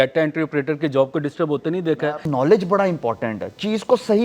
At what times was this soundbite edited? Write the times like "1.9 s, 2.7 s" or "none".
2.0 s